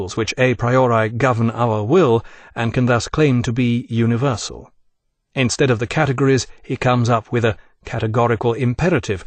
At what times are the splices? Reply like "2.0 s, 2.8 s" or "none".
7.6 s